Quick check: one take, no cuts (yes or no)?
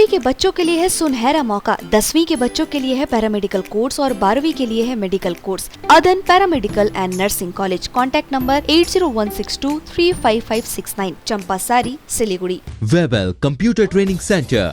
no